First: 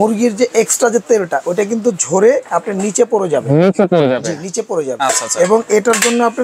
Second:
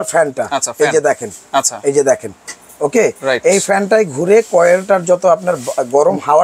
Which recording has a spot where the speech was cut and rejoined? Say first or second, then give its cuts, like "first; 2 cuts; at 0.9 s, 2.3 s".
first; 1 cut; at 4.9 s